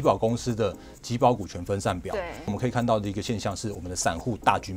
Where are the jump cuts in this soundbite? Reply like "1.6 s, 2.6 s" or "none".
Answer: 2.5 s